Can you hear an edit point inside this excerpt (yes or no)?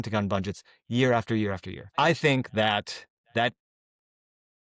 yes